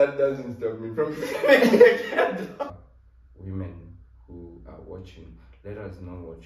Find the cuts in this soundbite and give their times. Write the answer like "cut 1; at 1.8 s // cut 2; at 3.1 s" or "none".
cut 1; at 2.7 s